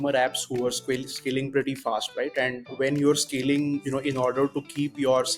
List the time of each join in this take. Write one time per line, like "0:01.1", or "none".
0:03.8